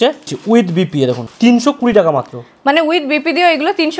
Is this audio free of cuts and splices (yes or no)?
yes